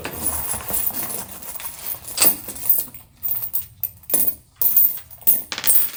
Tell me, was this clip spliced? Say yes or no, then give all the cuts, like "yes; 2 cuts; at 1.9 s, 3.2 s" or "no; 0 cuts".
no; 0 cuts